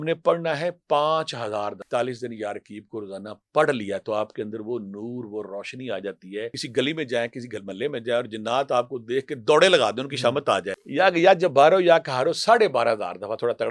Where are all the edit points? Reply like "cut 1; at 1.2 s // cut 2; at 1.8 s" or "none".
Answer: cut 1; at 1.8 s // cut 2; at 6.6 s // cut 3; at 10.8 s